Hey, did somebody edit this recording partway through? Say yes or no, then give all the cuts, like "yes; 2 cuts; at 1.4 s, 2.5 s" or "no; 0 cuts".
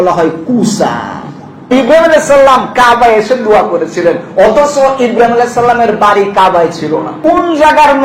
yes; 2 cuts; at 1.7 s, 7.1 s